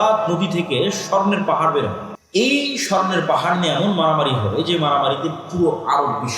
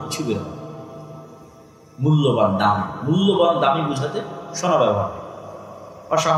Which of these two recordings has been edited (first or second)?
first